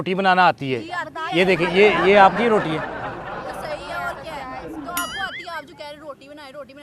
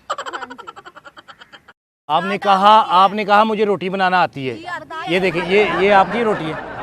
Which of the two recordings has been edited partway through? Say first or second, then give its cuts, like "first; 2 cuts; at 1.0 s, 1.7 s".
second; 1 cut; at 1.6 s